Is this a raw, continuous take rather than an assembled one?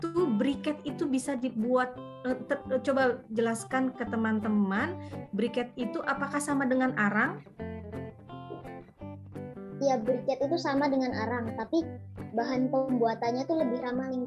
yes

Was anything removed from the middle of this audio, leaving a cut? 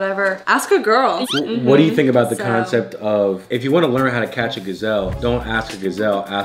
yes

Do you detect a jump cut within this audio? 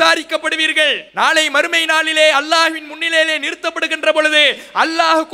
yes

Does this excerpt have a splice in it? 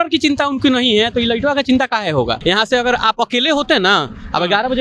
yes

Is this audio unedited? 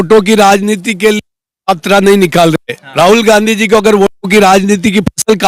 yes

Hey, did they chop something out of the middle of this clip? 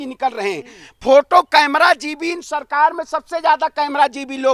no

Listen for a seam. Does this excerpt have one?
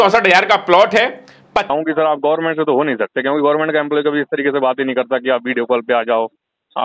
yes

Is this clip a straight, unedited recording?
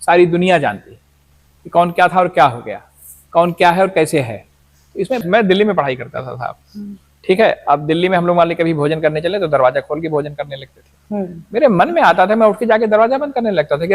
no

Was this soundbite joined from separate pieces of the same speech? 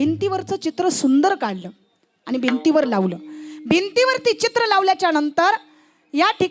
no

